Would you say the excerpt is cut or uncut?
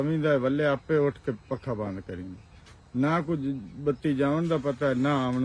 uncut